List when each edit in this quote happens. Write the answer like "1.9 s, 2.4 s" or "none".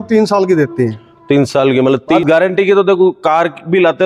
2.2 s